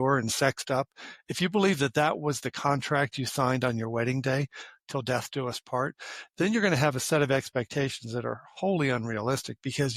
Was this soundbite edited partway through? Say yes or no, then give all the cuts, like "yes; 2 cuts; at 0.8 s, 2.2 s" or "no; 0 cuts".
no; 0 cuts